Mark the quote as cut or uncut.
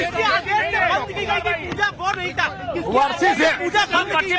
cut